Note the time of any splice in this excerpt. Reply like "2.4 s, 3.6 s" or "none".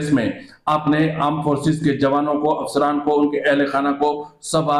none